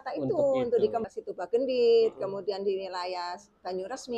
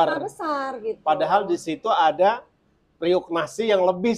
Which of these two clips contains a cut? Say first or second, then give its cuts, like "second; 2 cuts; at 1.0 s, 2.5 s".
first; 1 cut; at 1.1 s